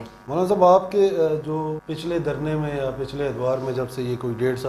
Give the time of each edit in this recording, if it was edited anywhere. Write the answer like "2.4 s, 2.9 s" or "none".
1.9 s